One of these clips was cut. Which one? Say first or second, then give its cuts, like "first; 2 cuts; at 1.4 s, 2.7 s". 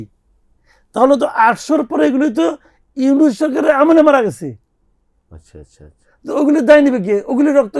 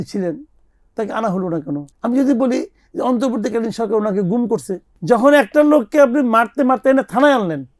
second; 2 cuts; at 1.9 s, 4.9 s